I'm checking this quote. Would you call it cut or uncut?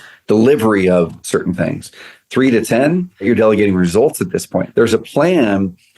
cut